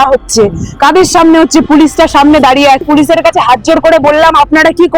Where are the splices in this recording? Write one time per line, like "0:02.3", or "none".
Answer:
0:02.8